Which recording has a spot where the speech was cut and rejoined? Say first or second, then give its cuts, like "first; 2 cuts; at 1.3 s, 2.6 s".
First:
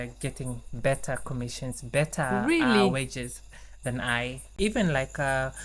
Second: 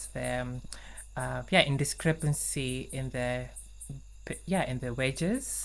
first; 1 cut; at 4.6 s